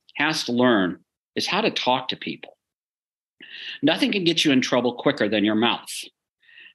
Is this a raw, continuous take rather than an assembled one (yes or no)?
yes